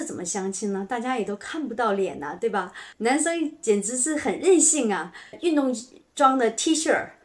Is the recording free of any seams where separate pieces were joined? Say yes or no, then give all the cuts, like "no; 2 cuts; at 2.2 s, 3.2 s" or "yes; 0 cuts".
no; 2 cuts; at 2.8 s, 5.3 s